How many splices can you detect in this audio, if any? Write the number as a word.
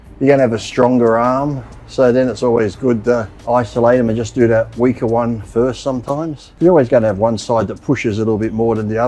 two